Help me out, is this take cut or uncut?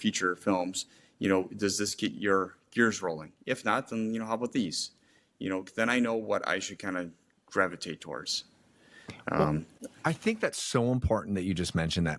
uncut